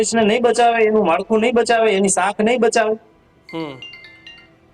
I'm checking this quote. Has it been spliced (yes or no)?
no